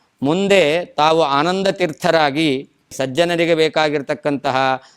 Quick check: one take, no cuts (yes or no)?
no